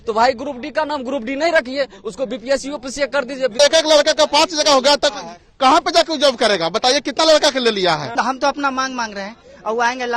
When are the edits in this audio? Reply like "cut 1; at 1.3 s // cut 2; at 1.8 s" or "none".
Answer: cut 1; at 3.5 s // cut 2; at 8.2 s